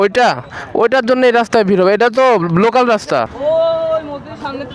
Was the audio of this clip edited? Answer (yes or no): yes